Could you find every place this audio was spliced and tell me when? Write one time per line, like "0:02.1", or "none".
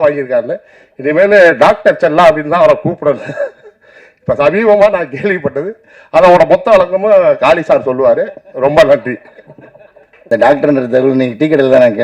0:10.1